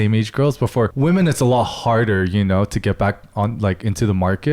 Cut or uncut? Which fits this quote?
cut